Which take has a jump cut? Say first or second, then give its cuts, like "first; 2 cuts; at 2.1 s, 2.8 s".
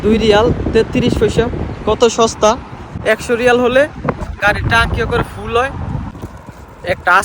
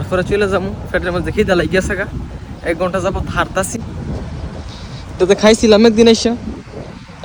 first; 1 cut; at 6.1 s